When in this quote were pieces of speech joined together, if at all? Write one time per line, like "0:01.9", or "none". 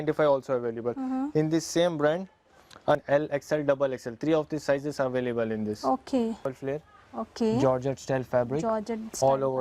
0:03.0
0:06.6